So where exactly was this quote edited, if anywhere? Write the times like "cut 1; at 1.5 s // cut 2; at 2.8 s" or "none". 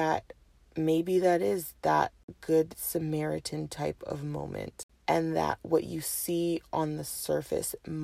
cut 1; at 2.3 s // cut 2; at 4.8 s